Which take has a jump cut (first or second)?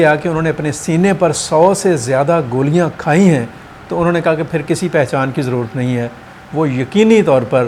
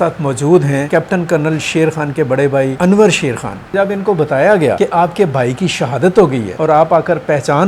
second